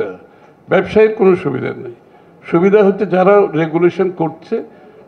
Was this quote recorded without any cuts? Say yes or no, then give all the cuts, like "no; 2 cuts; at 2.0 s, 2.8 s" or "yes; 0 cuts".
yes; 0 cuts